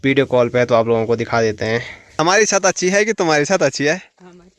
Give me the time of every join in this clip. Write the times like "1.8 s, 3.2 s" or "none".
2.0 s